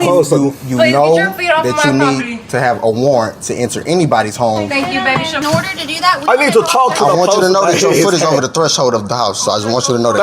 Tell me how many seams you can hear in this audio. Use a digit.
1